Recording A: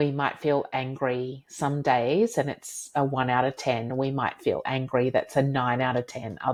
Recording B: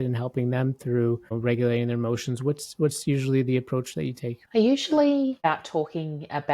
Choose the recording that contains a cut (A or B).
B